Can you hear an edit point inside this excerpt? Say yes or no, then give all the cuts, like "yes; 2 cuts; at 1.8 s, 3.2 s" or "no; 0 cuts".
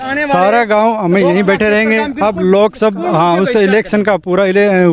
no; 0 cuts